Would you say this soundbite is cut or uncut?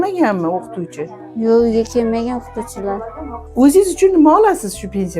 cut